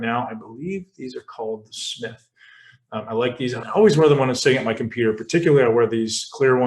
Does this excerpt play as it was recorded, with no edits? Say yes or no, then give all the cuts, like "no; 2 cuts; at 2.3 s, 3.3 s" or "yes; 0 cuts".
no; 1 cut; at 3.6 s